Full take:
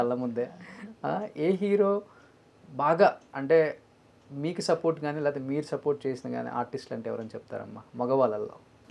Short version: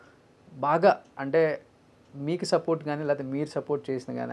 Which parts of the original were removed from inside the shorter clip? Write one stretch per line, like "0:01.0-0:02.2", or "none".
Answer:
none